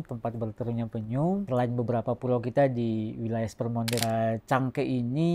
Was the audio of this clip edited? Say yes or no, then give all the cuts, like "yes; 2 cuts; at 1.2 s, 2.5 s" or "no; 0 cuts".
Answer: yes; 2 cuts; at 1.5 s, 4.0 s